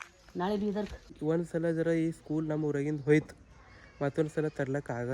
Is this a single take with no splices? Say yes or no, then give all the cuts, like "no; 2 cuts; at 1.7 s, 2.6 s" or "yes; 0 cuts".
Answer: no; 1 cut; at 1.2 s